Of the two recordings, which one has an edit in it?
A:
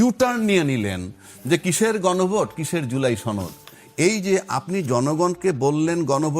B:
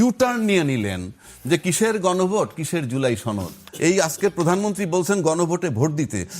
B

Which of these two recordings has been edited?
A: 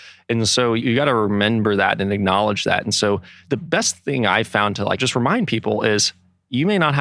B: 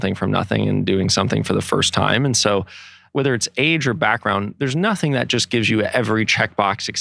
A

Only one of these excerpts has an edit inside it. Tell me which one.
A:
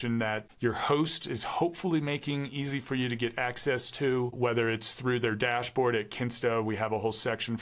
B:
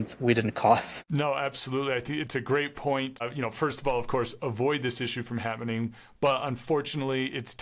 B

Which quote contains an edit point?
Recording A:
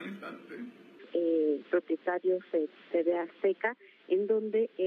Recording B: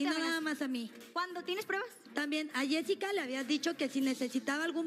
A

